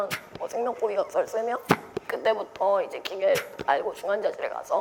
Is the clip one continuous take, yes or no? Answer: yes